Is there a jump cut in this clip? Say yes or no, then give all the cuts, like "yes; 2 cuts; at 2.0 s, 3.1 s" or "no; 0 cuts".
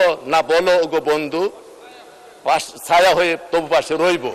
no; 0 cuts